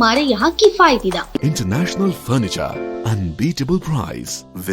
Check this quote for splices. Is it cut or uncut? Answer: cut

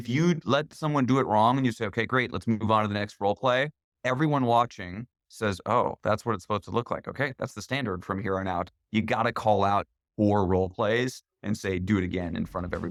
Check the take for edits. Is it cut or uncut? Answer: uncut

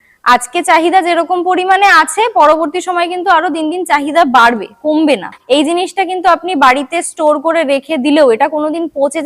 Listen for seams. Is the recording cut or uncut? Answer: cut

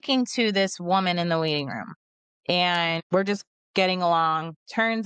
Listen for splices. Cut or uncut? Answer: cut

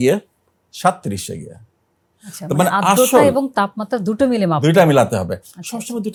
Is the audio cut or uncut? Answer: uncut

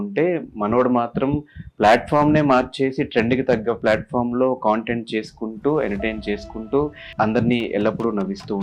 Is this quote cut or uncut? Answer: cut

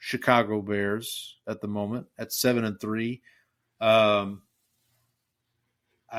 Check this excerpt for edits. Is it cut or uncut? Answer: uncut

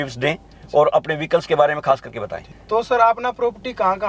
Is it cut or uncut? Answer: uncut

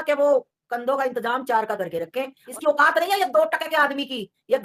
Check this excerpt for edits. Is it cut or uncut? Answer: cut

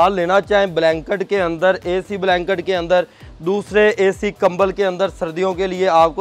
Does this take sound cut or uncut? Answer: uncut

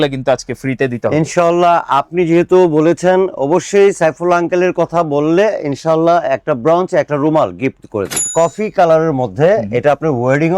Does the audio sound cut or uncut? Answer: cut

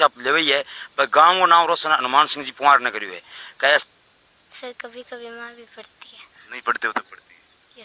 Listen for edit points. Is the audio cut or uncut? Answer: cut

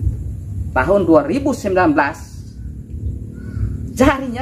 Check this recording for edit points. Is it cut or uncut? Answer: uncut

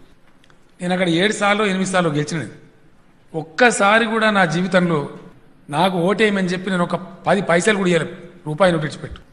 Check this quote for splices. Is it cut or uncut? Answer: uncut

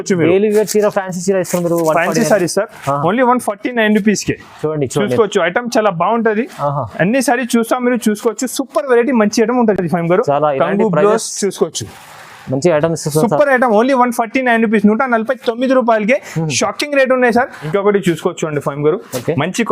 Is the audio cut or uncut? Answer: uncut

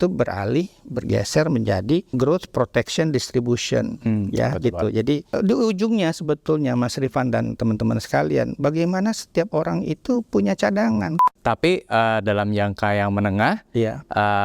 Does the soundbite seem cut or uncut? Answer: cut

